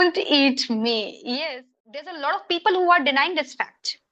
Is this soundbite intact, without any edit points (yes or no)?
no